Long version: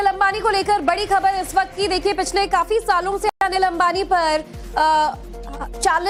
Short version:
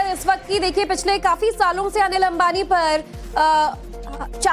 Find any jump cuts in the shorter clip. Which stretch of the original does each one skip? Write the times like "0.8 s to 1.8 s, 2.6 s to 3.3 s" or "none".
3.3 s to 3.4 s